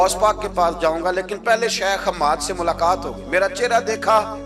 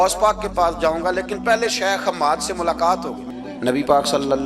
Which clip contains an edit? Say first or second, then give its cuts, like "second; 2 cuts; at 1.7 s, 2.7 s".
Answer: second; 1 cut; at 3.2 s